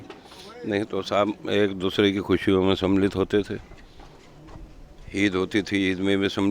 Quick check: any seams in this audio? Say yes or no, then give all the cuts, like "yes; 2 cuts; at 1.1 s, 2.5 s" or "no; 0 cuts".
no; 0 cuts